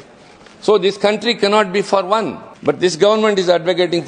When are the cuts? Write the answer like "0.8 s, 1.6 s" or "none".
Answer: 2.4 s